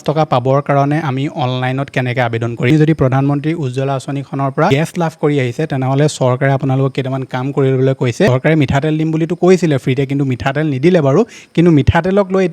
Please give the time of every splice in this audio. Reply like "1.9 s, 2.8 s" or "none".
2.7 s, 4.7 s, 8.3 s

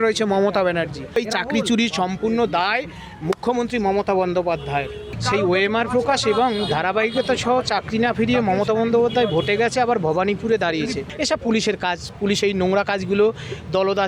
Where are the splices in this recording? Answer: 1.2 s, 5.1 s, 11.1 s

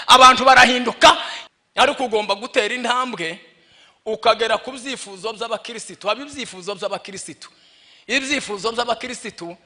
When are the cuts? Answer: 1.3 s

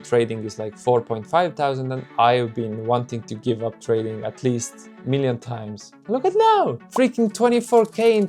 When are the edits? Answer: 2.0 s, 6.0 s

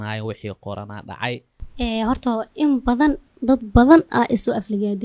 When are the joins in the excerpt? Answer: 1.6 s

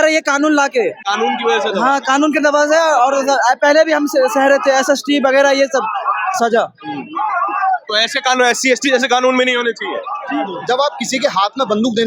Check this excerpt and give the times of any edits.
1.0 s, 10.5 s

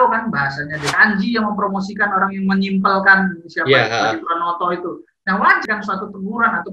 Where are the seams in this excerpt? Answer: 0.9 s, 5.6 s

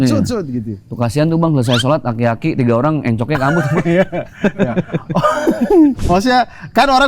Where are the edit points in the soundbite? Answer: 6.0 s

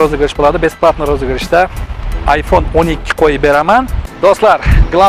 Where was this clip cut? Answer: 4.0 s

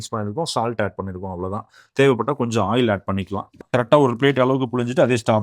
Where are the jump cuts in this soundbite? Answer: 3.6 s

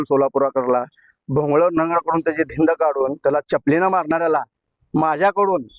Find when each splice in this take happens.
none

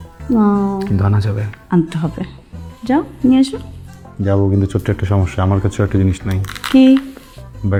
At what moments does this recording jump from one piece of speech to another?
none

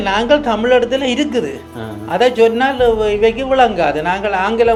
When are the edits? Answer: none

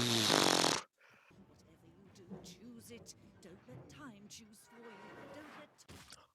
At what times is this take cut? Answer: 1.3 s

